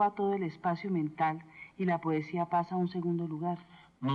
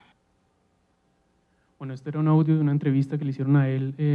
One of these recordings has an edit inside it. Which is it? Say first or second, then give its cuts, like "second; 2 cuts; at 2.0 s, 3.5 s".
first; 1 cut; at 1.1 s